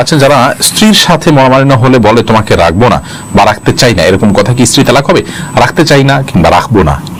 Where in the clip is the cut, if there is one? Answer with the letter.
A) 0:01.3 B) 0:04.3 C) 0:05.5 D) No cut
D